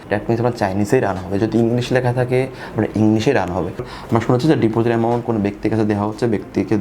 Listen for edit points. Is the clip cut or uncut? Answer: cut